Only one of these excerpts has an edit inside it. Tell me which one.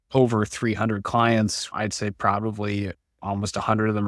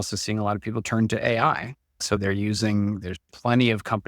first; 1 cut; at 1.7 s

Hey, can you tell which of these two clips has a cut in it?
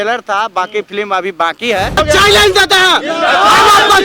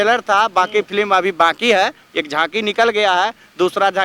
first; 1 cut; at 2.0 s

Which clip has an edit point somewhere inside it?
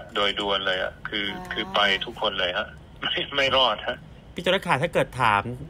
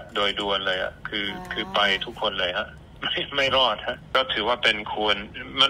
second; 1 cut; at 4.0 s

